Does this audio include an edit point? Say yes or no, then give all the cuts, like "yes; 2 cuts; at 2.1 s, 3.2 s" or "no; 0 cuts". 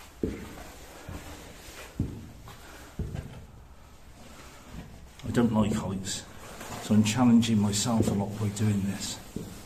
no; 0 cuts